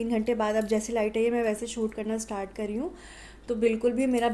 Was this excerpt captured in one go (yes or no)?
yes